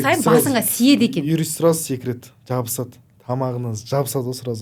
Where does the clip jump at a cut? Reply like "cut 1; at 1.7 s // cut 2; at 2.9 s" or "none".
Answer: none